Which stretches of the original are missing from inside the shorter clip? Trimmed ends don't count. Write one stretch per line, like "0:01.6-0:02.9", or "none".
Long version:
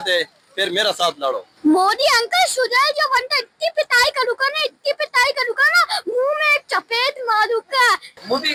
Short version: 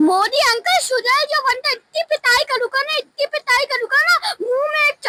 none